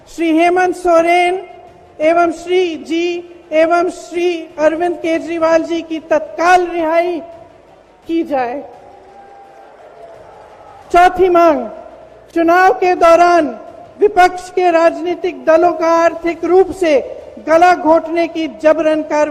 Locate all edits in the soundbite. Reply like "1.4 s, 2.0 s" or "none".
none